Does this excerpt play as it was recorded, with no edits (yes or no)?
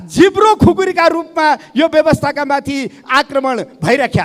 yes